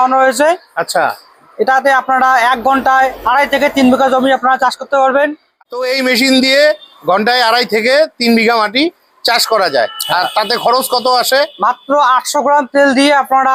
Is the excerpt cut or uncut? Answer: uncut